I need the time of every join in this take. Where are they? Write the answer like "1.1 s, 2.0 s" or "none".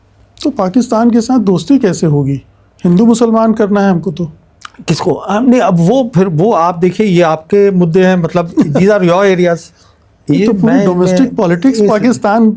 none